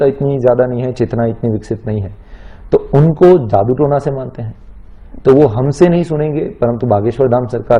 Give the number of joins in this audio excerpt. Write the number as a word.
zero